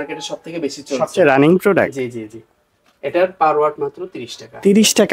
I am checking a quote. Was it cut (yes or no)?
no